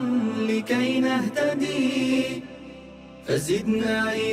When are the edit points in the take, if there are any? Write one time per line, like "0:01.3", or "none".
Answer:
none